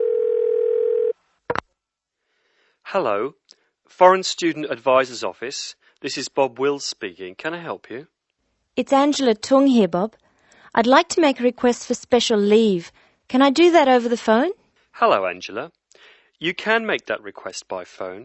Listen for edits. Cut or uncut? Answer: cut